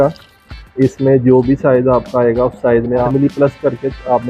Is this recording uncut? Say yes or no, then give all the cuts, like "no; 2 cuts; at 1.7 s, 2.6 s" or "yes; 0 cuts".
no; 1 cut; at 3.1 s